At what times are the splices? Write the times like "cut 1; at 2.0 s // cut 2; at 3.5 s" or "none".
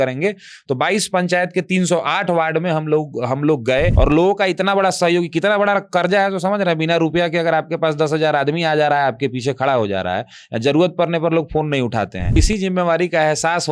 cut 1; at 3.9 s // cut 2; at 12.4 s